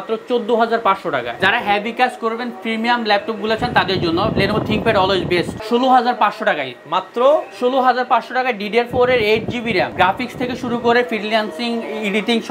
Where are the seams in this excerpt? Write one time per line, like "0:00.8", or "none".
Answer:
0:01.3
0:05.5
0:09.9